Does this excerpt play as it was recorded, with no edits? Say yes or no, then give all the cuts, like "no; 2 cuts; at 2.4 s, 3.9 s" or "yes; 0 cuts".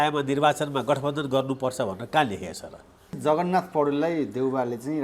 no; 1 cut; at 3.1 s